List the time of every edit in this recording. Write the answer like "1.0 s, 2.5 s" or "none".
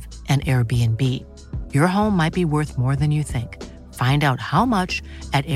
none